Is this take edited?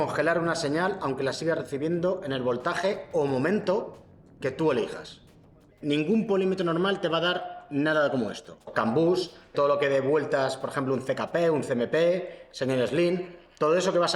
yes; 3 cuts; at 5.6 s, 8.7 s, 9.5 s

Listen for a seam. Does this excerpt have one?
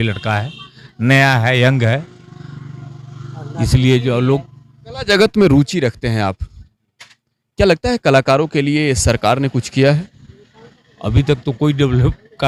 no; 0 cuts

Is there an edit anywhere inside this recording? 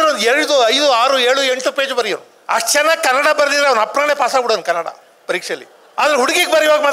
yes; 2 cuts; at 2.3 s, 5.8 s

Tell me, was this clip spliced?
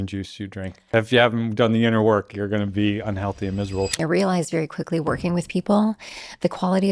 yes; 2 cuts; at 0.9 s, 4.0 s

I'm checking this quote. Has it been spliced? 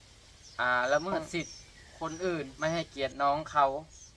yes; 1 cut; at 2.5 s

